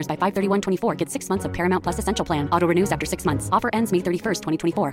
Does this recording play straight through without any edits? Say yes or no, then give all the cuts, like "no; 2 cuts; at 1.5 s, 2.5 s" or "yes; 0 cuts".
yes; 0 cuts